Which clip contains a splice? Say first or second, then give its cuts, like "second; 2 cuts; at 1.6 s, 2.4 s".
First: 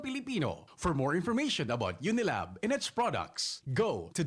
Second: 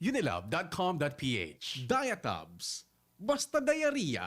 second; 1 cut; at 1.7 s